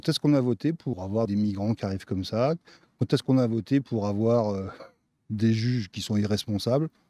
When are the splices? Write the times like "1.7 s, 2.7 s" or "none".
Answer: 1.0 s